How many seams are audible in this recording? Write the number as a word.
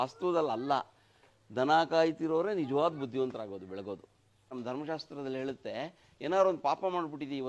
one